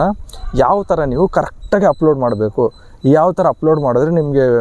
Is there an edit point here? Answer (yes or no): no